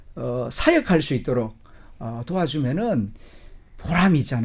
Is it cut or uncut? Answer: uncut